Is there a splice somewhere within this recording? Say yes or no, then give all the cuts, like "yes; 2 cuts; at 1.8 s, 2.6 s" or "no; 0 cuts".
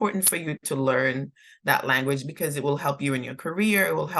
no; 0 cuts